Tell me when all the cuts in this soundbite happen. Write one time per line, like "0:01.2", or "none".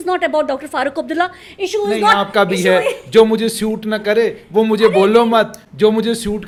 none